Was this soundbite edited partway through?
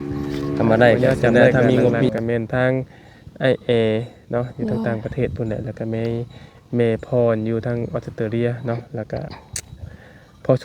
yes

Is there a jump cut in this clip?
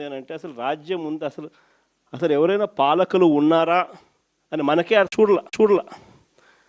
yes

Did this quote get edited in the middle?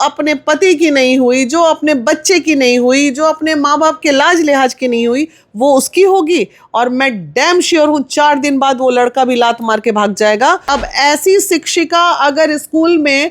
yes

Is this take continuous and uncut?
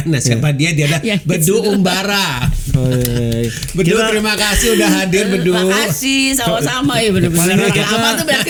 yes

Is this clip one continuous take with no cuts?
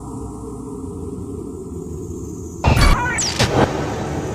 no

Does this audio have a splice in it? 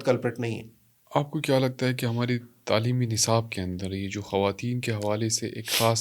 no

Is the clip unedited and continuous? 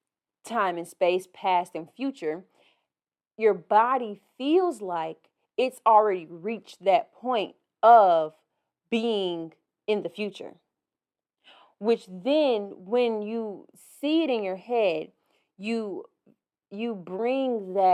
yes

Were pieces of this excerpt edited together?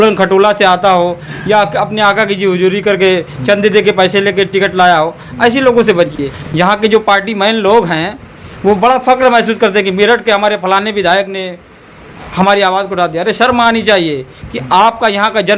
yes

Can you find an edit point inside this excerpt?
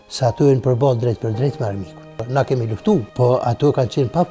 yes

